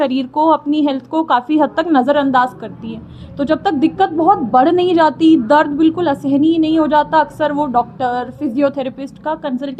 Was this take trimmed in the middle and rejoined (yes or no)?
no